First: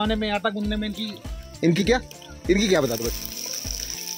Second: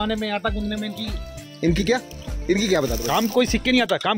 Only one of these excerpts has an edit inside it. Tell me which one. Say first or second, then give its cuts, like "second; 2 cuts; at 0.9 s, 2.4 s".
second; 1 cut; at 3.0 s